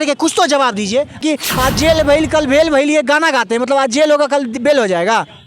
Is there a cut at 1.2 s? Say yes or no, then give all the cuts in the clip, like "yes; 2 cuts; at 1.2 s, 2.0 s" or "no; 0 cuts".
yes; 1 cut; at 1.2 s